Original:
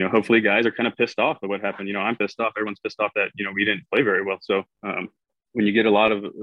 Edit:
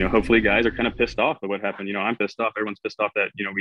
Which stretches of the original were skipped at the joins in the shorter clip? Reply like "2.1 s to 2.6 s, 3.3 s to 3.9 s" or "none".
none